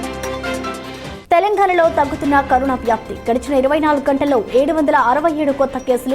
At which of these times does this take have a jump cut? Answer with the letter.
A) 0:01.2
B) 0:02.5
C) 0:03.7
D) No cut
A